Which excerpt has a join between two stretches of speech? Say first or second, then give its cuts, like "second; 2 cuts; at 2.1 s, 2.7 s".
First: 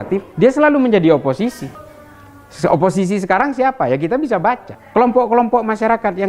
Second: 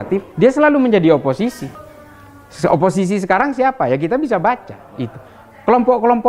first; 1 cut; at 4.7 s